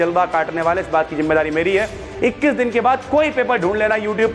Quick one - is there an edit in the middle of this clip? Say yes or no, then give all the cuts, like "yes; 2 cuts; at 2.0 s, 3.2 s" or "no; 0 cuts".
no; 0 cuts